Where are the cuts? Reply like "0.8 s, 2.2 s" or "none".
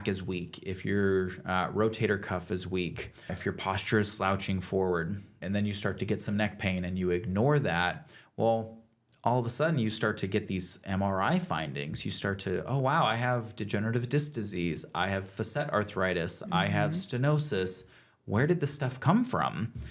3.4 s, 5.4 s